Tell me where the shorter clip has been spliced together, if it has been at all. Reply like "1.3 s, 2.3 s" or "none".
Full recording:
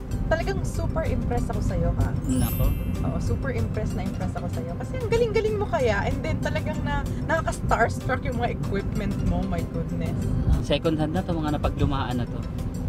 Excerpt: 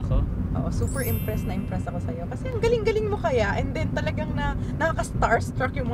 none